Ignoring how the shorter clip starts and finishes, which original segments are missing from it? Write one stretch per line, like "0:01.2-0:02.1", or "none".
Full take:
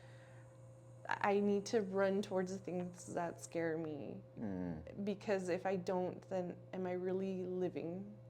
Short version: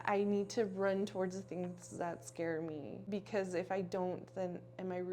0:04.2-0:05.0

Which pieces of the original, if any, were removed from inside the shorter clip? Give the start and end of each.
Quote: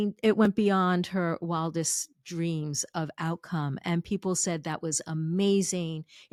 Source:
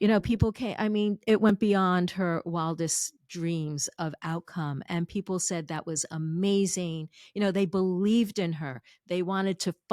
none

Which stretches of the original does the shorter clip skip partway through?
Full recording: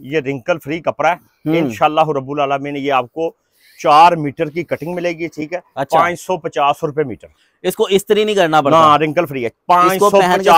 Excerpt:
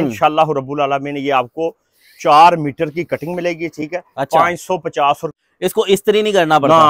0:06.9-0:07.3

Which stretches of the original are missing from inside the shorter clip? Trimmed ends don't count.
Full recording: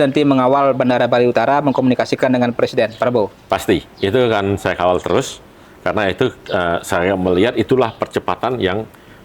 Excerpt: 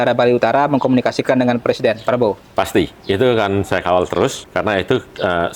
0:05.4-0:05.7

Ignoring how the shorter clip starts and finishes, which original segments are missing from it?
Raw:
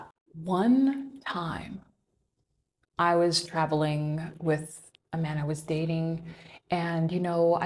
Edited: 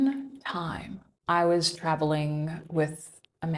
0:01.9-0:02.8

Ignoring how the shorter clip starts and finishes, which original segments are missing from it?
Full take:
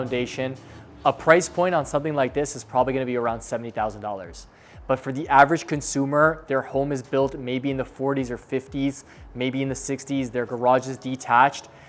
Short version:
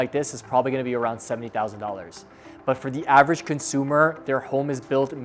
none

